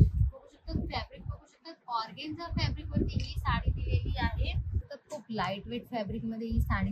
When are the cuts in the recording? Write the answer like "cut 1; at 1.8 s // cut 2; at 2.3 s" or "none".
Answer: cut 1; at 4.8 s